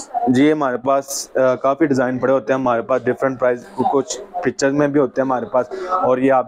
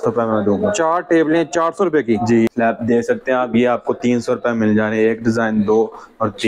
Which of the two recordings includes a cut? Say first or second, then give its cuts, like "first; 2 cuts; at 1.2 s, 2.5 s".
second; 1 cut; at 2.5 s